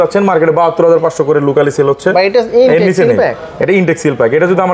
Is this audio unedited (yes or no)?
yes